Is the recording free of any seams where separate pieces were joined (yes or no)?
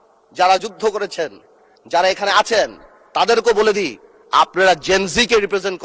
yes